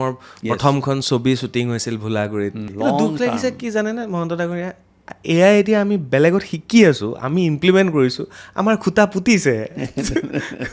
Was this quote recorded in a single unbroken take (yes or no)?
no